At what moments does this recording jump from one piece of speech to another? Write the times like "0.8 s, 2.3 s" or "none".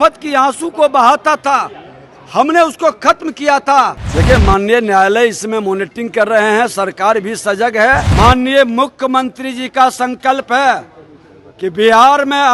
4.0 s, 8.1 s